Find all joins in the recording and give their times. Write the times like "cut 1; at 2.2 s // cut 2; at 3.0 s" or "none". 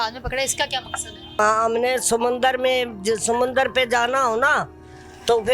cut 1; at 1.4 s